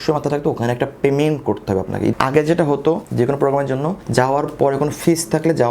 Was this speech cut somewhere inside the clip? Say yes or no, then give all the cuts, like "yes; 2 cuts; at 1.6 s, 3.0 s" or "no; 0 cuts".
yes; 3 cuts; at 2.1 s, 3.1 s, 4.0 s